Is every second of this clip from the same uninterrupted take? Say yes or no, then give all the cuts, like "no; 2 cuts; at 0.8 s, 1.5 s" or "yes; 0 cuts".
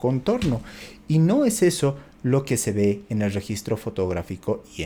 yes; 0 cuts